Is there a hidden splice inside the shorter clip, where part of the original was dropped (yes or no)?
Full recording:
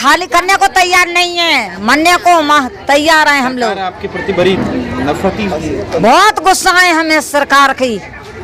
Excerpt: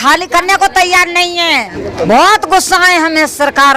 yes